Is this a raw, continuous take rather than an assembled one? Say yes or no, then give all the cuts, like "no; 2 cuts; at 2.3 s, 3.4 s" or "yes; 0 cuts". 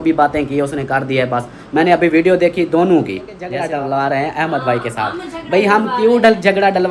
no; 1 cut; at 3.4 s